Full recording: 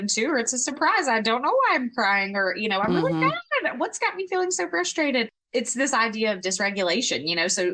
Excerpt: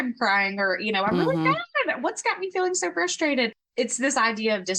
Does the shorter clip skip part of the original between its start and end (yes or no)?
no